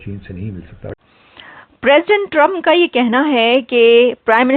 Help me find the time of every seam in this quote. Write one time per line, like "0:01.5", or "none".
0:00.9